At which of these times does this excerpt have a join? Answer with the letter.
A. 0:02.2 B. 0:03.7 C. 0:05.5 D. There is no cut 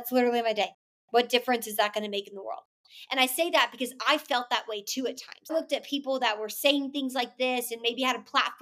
C